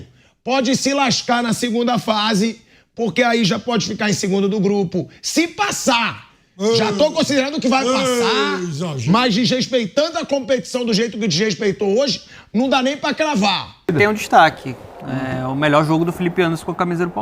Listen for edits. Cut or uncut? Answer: cut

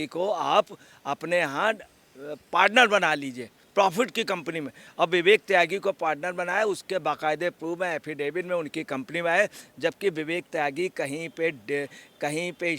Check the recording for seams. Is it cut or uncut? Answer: uncut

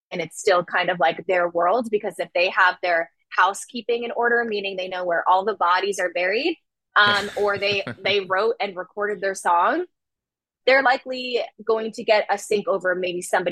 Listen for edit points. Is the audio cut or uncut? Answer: uncut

